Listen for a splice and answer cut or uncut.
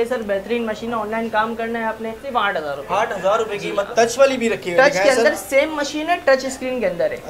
cut